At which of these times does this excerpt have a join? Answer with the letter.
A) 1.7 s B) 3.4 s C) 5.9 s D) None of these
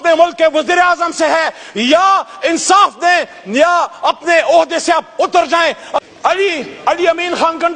C